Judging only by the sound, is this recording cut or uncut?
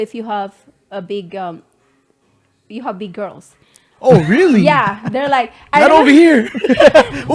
uncut